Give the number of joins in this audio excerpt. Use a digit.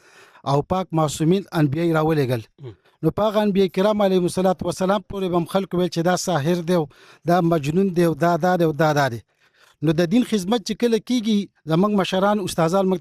0